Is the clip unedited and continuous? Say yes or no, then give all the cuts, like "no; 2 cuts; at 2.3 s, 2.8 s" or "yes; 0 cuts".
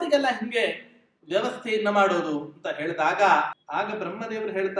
no; 1 cut; at 3.6 s